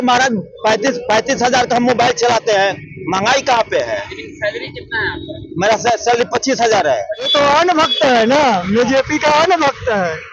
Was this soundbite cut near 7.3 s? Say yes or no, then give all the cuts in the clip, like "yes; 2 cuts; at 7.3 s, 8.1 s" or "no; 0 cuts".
yes; 1 cut; at 7.3 s